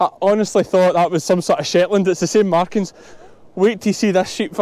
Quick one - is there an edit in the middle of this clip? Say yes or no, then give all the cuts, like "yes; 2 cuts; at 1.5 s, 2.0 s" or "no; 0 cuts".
no; 0 cuts